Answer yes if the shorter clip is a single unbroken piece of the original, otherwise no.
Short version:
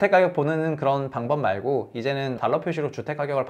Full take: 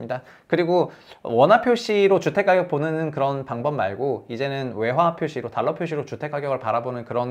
no